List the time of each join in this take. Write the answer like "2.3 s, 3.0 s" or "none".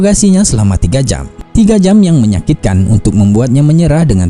none